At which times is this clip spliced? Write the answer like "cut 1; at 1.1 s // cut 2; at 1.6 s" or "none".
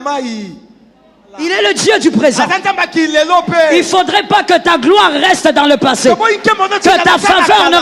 cut 1; at 1.3 s